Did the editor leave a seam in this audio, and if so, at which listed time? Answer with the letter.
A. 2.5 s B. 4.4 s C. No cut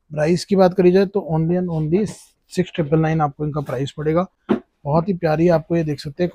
C